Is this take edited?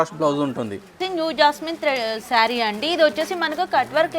yes; 1 cut; at 1.0 s

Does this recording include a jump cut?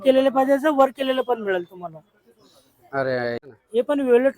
yes; 1 cut; at 3.4 s

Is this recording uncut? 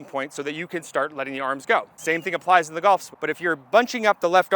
no; 2 cuts; at 1.9 s, 3.1 s

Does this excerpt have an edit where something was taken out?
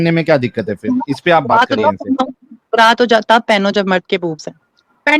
no; 0 cuts

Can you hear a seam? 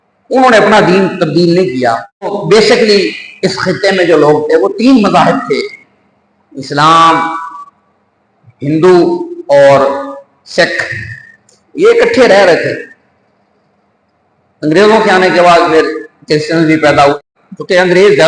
yes; 2 cuts; at 2.4 s, 17.2 s

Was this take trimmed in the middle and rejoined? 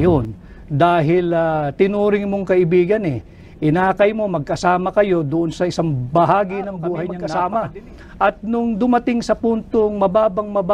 yes; 1 cut; at 7.1 s

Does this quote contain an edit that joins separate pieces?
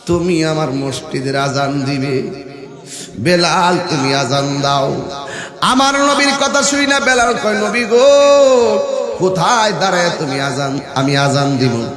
no; 0 cuts

